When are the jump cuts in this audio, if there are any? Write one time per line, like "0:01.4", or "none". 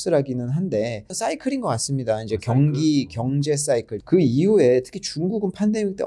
0:01.0
0:03.9